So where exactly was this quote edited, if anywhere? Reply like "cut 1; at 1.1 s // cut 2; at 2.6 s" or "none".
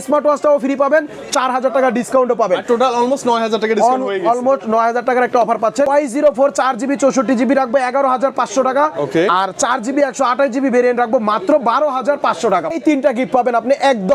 cut 1; at 5.9 s // cut 2; at 12.7 s